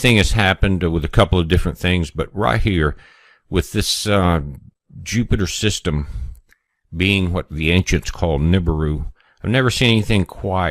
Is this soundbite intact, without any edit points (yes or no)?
yes